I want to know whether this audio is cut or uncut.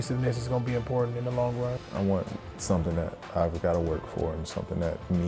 cut